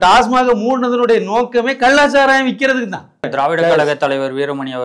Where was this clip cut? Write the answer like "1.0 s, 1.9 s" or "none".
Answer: 3.2 s